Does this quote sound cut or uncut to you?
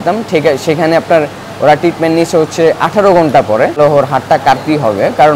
cut